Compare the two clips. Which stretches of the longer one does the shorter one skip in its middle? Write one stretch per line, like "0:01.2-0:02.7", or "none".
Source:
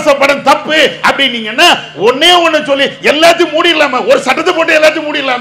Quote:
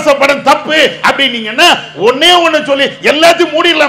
none